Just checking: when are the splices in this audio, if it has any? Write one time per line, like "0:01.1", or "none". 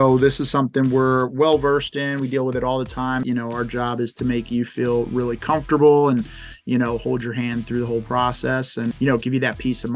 0:03.3
0:08.9

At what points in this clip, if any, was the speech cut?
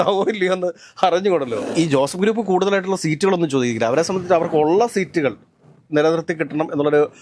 0:01.6

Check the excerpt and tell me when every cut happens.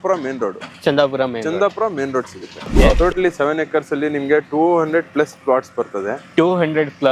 0:02.8

